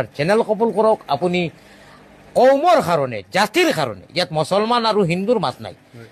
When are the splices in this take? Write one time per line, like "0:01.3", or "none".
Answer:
none